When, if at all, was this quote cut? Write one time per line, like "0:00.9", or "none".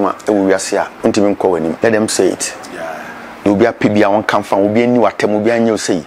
0:00.9
0:01.8